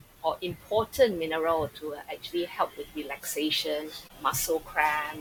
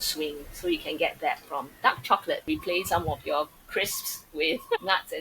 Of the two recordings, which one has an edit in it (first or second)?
second